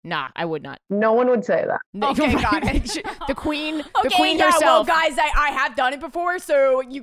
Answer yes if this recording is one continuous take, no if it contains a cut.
yes